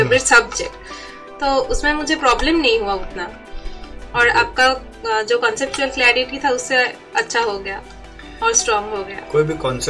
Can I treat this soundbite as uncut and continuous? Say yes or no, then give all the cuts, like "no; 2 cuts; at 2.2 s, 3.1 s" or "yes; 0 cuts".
yes; 0 cuts